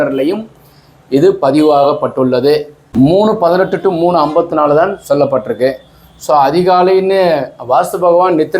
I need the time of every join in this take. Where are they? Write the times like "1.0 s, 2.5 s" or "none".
2.8 s